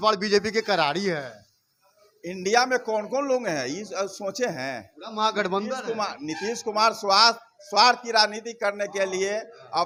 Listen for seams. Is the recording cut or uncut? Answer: uncut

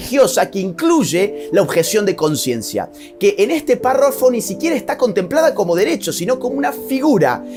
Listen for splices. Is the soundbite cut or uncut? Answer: uncut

